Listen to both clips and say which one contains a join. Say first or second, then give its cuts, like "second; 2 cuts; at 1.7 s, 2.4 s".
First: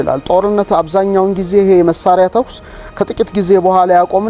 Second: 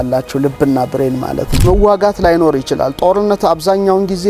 second; 1 cut; at 1.6 s